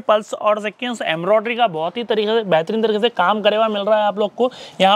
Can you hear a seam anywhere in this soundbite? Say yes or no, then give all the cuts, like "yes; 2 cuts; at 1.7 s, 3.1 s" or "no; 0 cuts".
no; 0 cuts